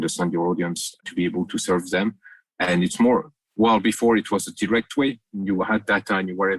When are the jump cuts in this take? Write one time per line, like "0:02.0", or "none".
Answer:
0:01.0